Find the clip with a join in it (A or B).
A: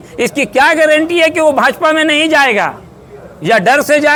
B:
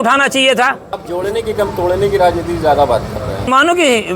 B